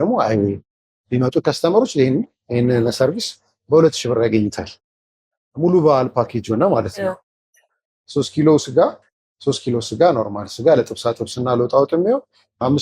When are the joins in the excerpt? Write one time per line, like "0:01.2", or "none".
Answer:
0:07.7